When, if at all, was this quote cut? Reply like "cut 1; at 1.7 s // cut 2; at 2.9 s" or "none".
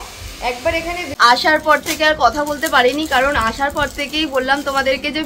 cut 1; at 1.1 s

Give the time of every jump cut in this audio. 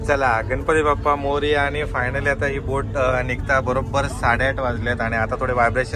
none

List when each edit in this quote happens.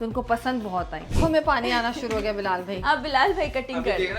cut 1; at 1.1 s

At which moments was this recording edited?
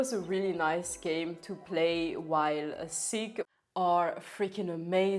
cut 1; at 3.4 s

